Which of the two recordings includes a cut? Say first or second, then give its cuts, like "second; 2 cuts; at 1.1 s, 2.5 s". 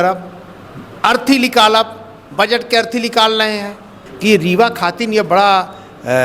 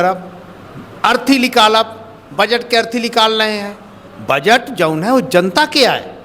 first; 1 cut; at 4.0 s